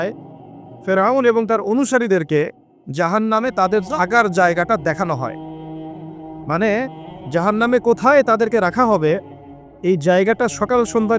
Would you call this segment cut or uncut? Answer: uncut